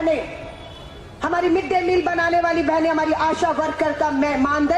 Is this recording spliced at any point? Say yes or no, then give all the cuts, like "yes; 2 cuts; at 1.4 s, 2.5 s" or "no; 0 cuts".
no; 0 cuts